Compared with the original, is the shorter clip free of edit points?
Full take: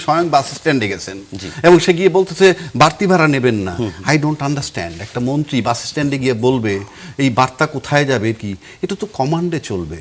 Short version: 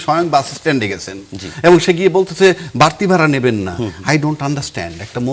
yes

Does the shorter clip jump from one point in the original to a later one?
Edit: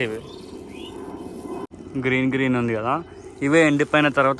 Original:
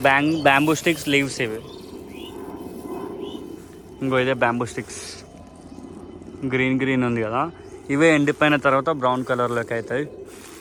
yes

